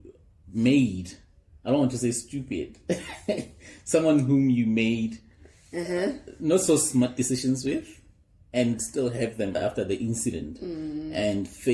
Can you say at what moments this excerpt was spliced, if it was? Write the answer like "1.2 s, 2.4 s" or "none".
none